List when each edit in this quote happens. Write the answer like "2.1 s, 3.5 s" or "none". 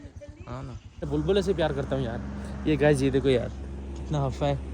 1.1 s